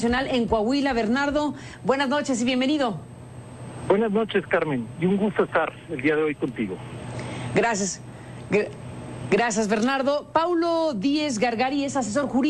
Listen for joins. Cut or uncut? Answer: cut